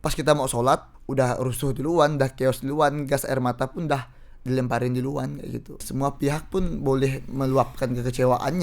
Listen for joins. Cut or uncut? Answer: cut